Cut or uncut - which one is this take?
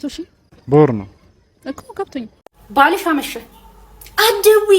cut